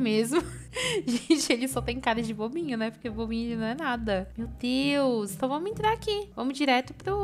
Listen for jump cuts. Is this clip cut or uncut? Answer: uncut